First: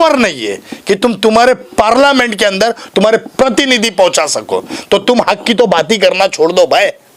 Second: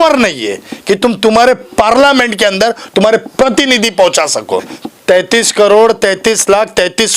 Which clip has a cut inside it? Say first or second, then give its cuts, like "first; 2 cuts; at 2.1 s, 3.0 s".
second; 1 cut; at 4.7 s